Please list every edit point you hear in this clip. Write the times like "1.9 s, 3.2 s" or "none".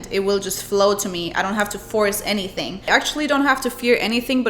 2.9 s